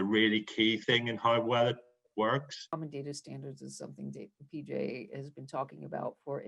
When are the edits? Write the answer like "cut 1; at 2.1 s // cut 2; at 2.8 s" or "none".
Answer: cut 1; at 2.7 s